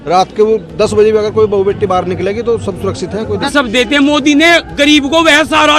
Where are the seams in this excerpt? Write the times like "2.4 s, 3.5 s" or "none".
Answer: 3.5 s